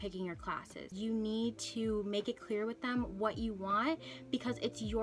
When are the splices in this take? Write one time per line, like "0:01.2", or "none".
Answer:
0:00.9